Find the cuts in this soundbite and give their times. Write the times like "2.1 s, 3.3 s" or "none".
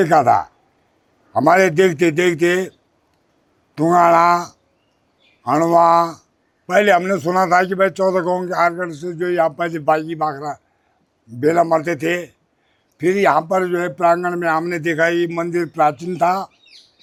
none